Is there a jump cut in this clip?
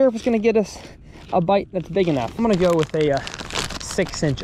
yes; 1 cut; at 2.3 s

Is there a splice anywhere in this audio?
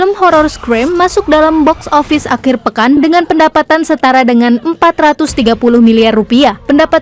no; 0 cuts

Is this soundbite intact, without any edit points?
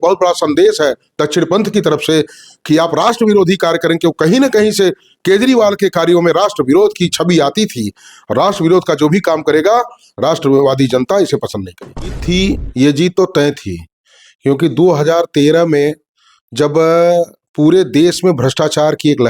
no; 1 cut; at 12.2 s

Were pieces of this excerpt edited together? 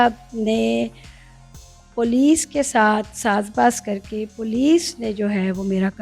no; 0 cuts

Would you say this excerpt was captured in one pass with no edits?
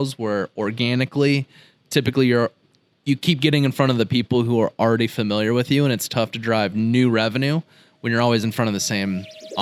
yes; 0 cuts

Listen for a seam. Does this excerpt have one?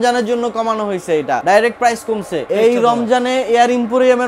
yes; 2 cuts; at 1.4 s, 2.5 s

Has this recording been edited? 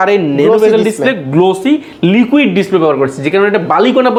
no; 0 cuts

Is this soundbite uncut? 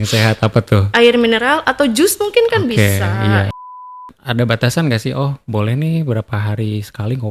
no; 1 cut; at 4.1 s

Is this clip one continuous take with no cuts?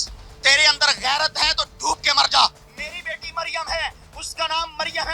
yes; 0 cuts

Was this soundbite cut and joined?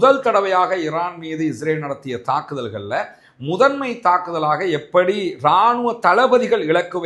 no; 0 cuts

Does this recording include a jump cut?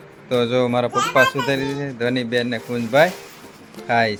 no; 0 cuts

